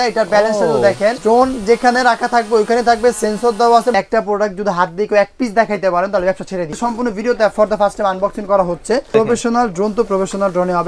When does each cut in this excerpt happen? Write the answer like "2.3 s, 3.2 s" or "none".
1.2 s, 3.9 s, 6.7 s, 9.1 s